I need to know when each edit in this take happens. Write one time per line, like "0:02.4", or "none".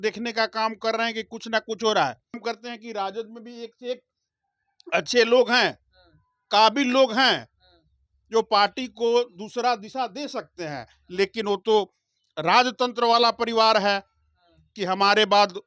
0:02.4